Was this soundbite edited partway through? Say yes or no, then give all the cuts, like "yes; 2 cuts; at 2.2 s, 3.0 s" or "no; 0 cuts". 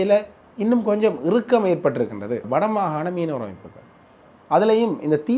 yes; 1 cut; at 2.5 s